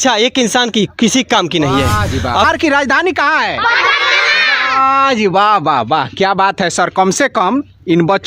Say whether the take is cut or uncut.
cut